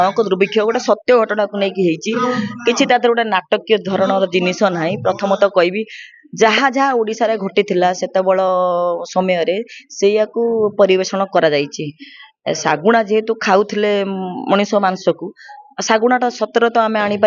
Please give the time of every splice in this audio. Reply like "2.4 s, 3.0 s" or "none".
none